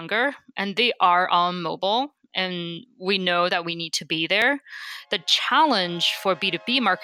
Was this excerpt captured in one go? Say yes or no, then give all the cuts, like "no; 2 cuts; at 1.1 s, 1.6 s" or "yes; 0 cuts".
yes; 0 cuts